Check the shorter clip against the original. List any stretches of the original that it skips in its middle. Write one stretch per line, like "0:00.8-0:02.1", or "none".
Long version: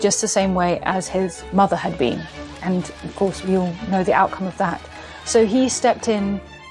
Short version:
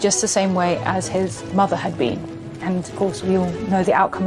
0:02.9-0:03.1